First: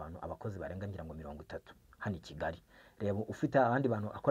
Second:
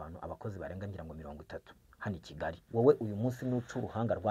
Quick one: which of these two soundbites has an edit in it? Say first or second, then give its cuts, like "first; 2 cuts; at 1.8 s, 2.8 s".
second; 1 cut; at 2.6 s